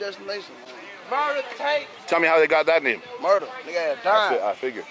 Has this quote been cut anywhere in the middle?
yes; 1 cut; at 1.9 s

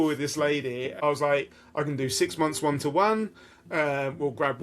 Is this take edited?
yes; 1 cut; at 1.0 s

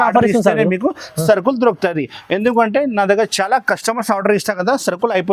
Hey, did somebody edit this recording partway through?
no; 0 cuts

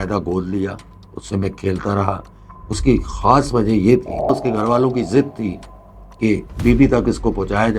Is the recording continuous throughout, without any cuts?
no; 1 cut; at 4.3 s

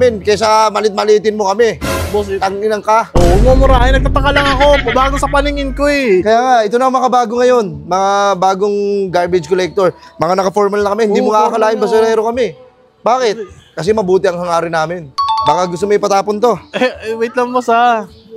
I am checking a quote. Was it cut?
no; 0 cuts

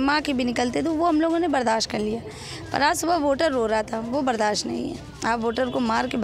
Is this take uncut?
yes; 0 cuts

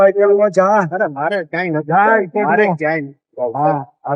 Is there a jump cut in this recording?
no; 0 cuts

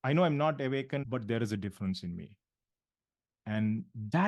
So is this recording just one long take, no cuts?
no; 1 cut; at 1.0 s

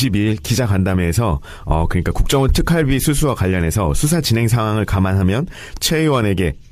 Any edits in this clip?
no; 0 cuts

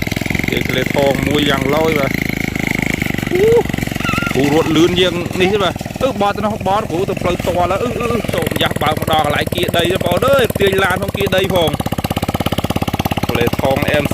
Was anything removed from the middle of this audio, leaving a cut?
yes; 1 cut; at 8.3 s

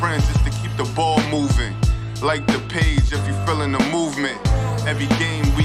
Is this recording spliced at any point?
no; 0 cuts

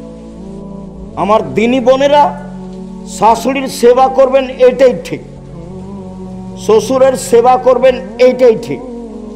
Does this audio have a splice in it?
no; 0 cuts

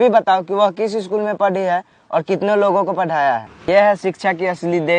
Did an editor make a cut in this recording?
yes; 1 cut; at 3.5 s

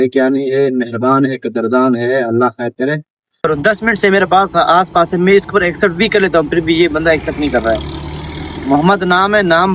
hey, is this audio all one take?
no; 1 cut; at 3.5 s

